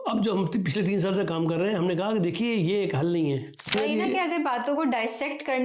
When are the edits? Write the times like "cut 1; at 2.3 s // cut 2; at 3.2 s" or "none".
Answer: cut 1; at 3.7 s